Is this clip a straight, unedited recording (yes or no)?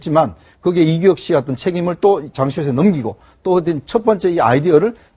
no